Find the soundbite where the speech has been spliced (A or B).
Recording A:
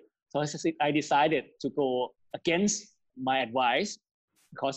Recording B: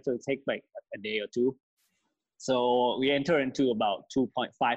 A